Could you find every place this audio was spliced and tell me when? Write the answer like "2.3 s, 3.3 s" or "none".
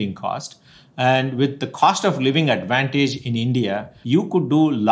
3.9 s